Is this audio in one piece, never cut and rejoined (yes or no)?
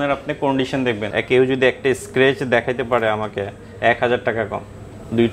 no